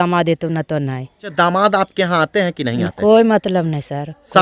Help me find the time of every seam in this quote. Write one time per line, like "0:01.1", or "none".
0:01.3